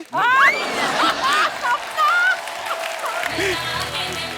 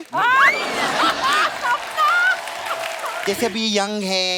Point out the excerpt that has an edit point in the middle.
second; 1 cut; at 3.2 s

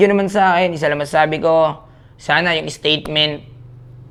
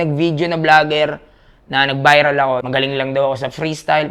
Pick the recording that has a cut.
second; 1 cut; at 2.6 s

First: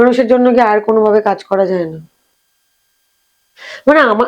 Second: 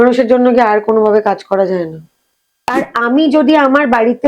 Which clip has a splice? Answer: second; 1 cut; at 2.7 s

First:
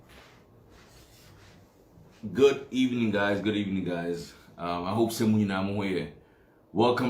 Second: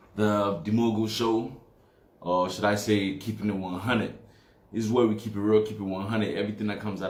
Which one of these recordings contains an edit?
first; 1 cut; at 1.0 s

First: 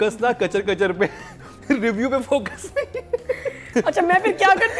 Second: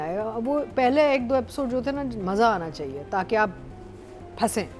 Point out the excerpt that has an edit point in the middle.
first; 1 cut; at 3.7 s

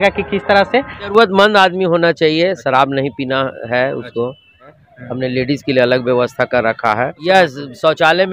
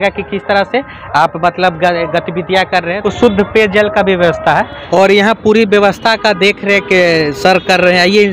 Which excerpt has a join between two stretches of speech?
first; 3 cuts; at 1.0 s, 4.8 s, 7.2 s

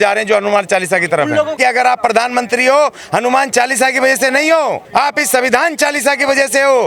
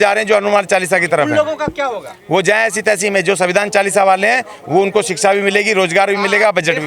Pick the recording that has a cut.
first; 2 cuts; at 1.6 s, 4.8 s

